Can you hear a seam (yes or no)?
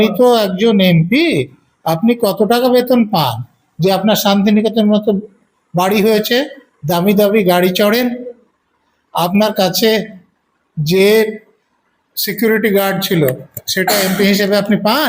no